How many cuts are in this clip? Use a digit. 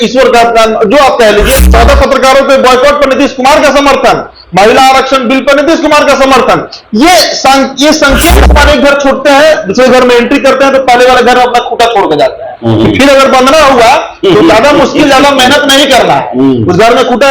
2